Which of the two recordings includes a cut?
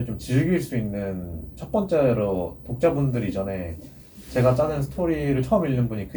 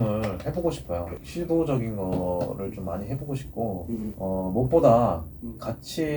second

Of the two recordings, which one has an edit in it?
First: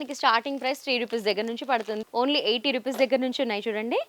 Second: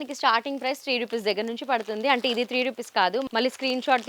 first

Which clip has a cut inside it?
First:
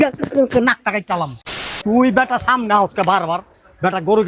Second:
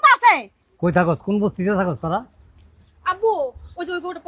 first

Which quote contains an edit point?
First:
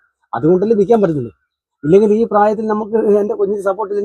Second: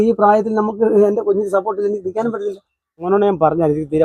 second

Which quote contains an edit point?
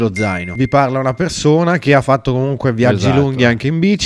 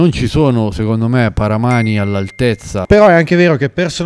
second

